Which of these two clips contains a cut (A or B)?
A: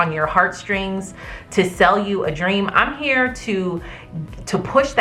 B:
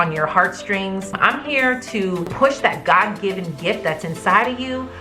B